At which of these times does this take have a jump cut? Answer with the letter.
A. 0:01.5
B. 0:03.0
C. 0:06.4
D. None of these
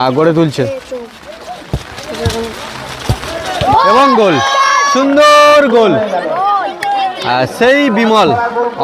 D